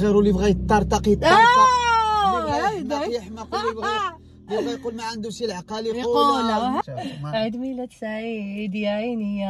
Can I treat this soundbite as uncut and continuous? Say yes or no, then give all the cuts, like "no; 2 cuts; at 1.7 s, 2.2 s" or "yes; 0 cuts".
no; 1 cut; at 6.8 s